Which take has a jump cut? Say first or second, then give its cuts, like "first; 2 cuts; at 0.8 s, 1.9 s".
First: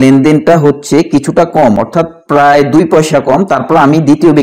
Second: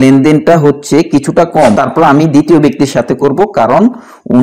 second; 1 cut; at 1.8 s